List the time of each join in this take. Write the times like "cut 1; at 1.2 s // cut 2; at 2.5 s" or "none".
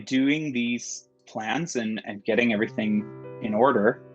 cut 1; at 1.2 s